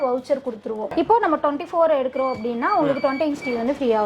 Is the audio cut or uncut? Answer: cut